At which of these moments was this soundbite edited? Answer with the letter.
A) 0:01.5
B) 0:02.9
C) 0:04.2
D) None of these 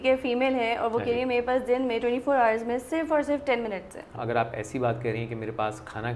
C